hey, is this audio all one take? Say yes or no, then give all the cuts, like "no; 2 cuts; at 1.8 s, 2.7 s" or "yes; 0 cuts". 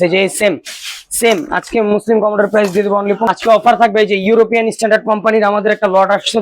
yes; 0 cuts